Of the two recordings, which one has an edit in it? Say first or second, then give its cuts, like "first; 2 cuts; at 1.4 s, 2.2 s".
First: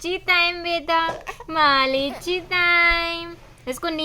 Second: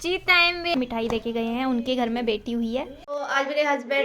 second; 2 cuts; at 0.7 s, 3.0 s